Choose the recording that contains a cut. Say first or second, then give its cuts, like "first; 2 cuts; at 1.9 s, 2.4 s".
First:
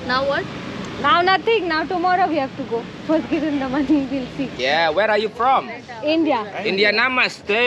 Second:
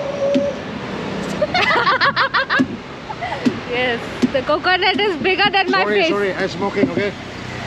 first; 1 cut; at 4.5 s